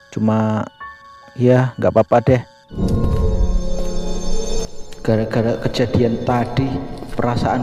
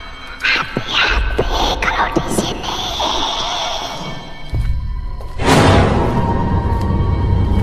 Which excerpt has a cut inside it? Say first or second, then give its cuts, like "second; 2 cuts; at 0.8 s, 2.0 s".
first; 1 cut; at 2.8 s